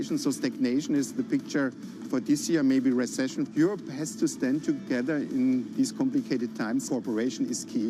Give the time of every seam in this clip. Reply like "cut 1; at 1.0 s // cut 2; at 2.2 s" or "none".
cut 1; at 6.8 s